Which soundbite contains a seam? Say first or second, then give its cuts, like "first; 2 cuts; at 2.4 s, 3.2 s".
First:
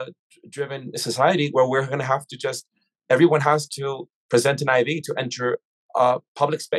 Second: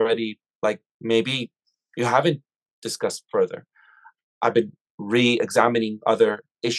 second; 1 cut; at 4.3 s